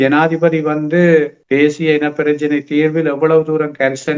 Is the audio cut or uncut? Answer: cut